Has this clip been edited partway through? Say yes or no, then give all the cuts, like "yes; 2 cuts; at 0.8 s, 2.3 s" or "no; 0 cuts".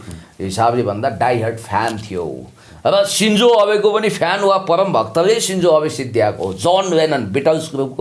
no; 0 cuts